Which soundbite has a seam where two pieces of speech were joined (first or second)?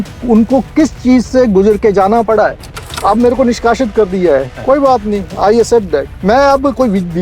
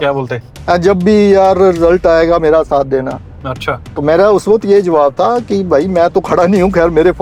first